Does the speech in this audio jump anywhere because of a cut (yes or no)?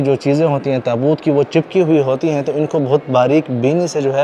no